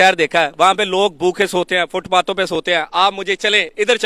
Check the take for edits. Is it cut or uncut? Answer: uncut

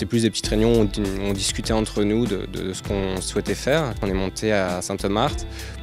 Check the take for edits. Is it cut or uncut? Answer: cut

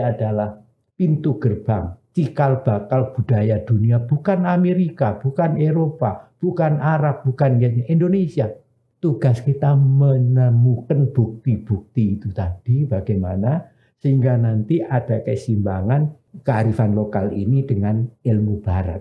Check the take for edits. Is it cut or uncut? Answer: cut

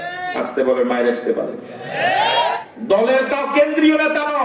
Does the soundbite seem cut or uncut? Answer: cut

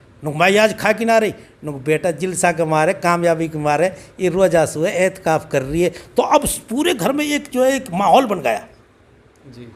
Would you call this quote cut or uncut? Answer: uncut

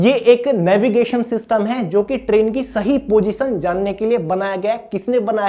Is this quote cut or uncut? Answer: uncut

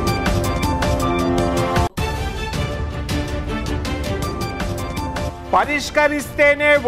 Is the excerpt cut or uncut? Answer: uncut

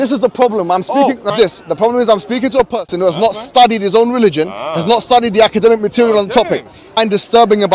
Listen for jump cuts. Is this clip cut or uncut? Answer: cut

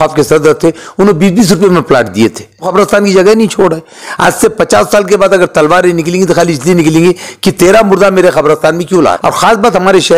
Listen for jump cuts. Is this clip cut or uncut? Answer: cut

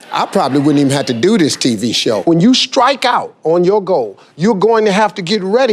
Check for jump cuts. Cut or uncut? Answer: cut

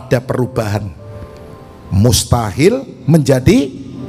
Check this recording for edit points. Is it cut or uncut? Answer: uncut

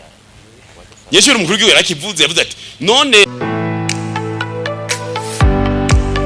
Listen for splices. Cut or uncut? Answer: cut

